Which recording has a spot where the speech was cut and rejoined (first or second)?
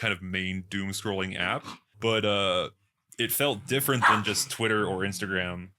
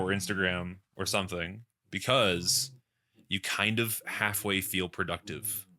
first